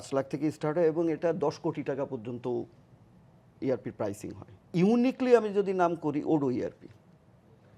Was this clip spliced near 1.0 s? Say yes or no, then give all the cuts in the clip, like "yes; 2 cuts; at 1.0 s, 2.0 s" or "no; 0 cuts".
no; 1 cut; at 4.7 s